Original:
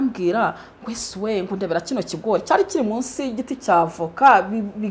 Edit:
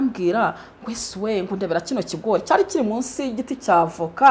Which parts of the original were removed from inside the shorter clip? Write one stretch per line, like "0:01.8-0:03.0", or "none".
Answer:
none